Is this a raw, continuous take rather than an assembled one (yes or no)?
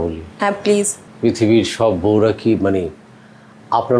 no